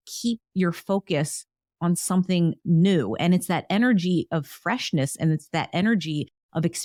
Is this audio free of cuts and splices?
yes; 0 cuts

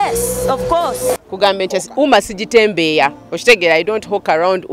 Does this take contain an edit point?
yes; 1 cut; at 1.2 s

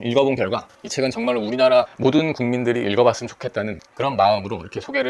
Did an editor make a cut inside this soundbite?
no; 0 cuts

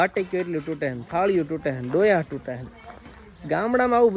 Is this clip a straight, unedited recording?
yes; 0 cuts

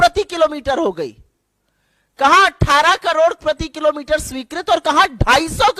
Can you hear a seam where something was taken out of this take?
no; 0 cuts

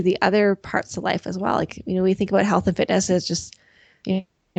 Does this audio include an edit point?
no; 0 cuts

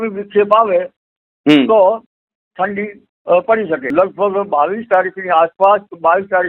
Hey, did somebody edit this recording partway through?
yes; 1 cut; at 3.8 s

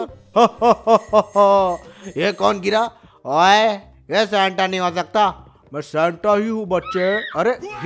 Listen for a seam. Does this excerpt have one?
no; 0 cuts

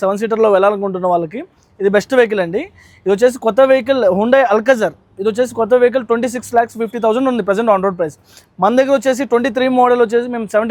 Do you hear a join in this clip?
no; 0 cuts

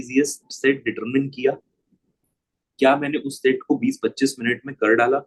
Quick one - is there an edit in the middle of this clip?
no; 0 cuts

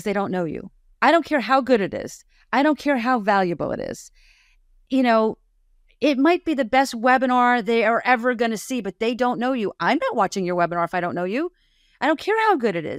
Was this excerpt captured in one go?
yes; 0 cuts

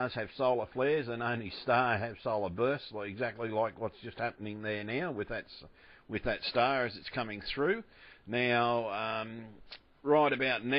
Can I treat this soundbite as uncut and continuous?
no; 1 cut; at 1.1 s

